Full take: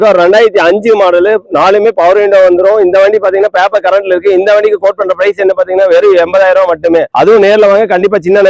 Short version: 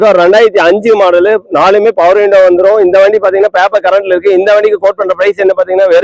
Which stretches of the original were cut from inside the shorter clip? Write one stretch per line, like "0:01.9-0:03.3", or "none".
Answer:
none